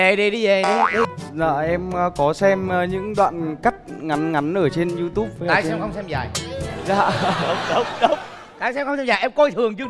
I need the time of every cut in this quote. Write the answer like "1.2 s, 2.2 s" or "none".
1.1 s